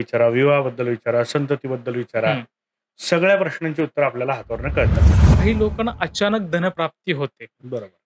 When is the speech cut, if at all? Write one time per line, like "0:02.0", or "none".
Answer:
0:05.2